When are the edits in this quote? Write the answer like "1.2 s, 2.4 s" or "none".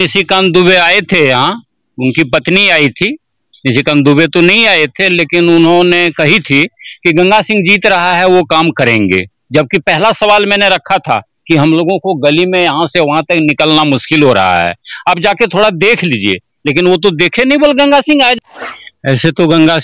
18.3 s